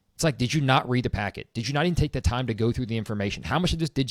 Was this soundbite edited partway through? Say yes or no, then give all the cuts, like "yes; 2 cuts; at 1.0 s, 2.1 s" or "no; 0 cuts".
no; 0 cuts